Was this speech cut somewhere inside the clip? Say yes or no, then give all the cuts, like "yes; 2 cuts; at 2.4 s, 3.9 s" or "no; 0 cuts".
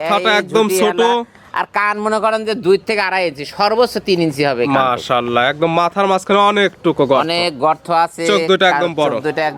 no; 0 cuts